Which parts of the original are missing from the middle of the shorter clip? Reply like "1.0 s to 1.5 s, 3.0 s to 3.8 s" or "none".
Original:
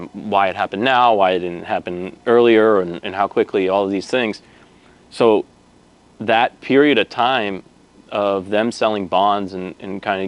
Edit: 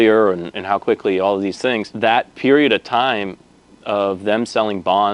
4.4 s to 6.1 s